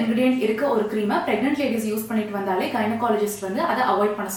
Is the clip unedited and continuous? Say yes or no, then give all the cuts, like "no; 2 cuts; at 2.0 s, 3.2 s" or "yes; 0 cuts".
yes; 0 cuts